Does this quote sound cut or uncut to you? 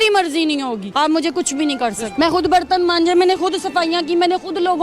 cut